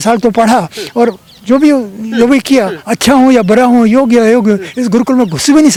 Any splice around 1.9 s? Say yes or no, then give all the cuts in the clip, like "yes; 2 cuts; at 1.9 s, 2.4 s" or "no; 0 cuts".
no; 0 cuts